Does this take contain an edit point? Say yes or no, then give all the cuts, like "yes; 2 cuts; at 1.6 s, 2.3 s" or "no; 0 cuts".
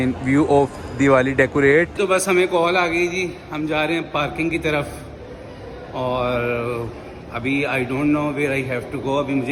no; 0 cuts